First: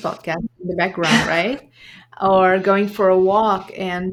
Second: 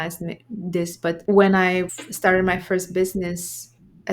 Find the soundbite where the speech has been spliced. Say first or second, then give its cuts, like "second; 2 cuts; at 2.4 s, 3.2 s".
second; 2 cuts; at 1.2 s, 2.0 s